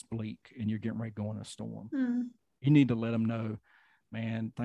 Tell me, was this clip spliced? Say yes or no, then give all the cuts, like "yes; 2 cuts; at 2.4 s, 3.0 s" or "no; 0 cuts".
no; 0 cuts